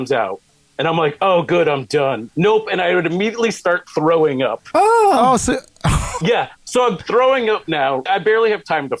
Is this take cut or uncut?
cut